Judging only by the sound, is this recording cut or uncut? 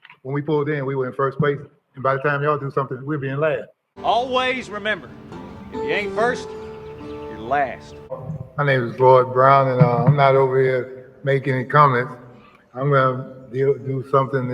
cut